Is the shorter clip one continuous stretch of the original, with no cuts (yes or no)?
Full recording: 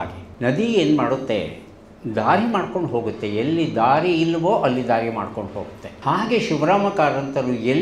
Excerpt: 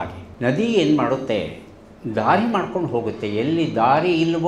yes